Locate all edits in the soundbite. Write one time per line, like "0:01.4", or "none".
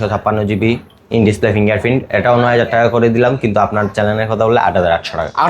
none